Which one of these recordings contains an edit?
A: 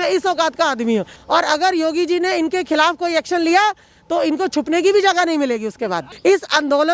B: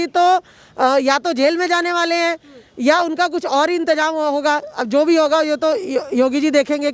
A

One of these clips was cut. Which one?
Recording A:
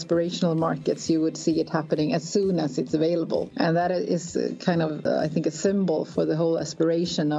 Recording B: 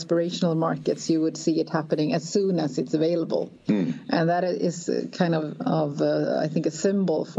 A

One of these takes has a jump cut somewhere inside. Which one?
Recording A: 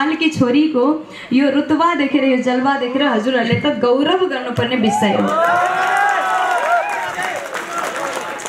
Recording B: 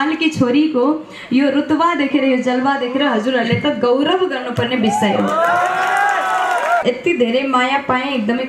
B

